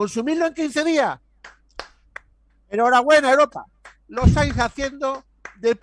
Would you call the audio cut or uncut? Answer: uncut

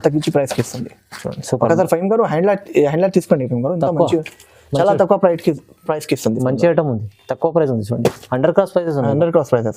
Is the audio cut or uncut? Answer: uncut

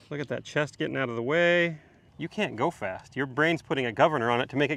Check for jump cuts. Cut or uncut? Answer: cut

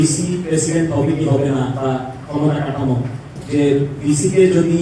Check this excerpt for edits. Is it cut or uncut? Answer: cut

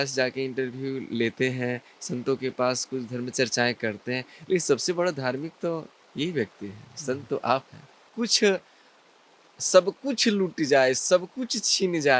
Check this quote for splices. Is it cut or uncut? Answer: cut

